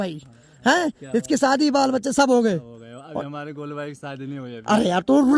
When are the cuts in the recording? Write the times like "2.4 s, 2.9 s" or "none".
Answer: none